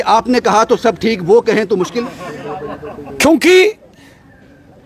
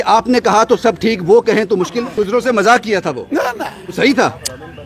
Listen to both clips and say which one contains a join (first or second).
second